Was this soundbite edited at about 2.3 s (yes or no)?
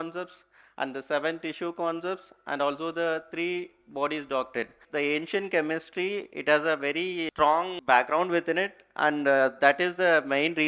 no